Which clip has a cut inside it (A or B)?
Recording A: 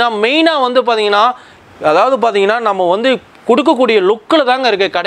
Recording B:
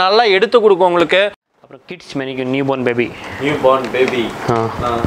B